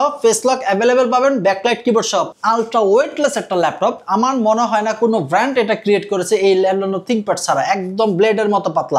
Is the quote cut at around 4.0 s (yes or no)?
no